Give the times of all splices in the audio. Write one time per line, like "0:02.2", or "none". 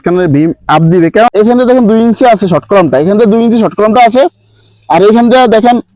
0:01.3